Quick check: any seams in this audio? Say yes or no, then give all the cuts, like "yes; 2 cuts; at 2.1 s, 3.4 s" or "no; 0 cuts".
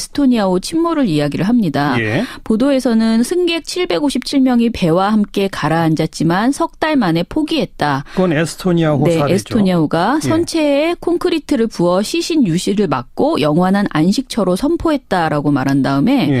no; 0 cuts